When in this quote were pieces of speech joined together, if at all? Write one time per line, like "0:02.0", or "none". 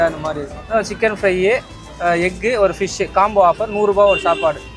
none